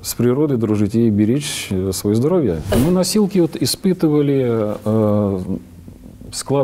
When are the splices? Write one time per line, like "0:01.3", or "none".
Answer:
0:02.8